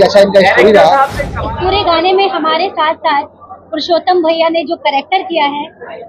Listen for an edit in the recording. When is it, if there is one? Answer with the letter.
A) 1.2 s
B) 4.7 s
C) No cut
A